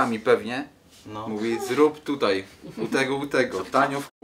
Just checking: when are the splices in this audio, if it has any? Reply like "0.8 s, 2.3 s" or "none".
none